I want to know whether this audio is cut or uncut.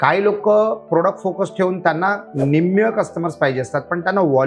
uncut